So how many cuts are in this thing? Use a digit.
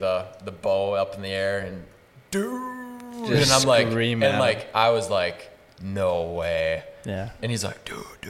0